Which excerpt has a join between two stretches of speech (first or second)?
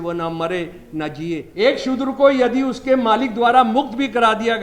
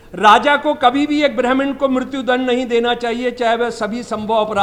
first